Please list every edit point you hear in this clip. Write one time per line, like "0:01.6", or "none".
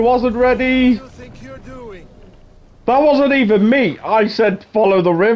0:01.1